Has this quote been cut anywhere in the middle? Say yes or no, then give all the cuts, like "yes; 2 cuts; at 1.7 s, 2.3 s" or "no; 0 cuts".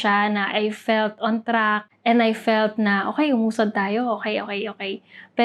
no; 0 cuts